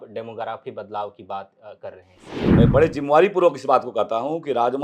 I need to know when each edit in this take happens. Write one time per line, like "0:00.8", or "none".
0:02.6